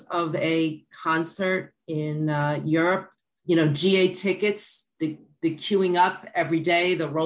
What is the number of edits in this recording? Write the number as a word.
one